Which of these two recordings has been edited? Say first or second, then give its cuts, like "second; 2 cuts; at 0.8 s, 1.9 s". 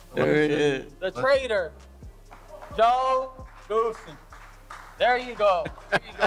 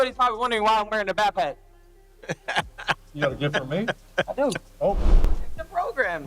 second; 1 cut; at 5.1 s